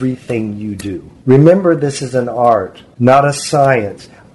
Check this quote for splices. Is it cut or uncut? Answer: cut